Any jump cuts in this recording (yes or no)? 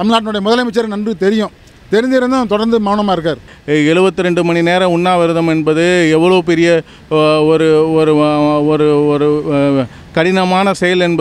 yes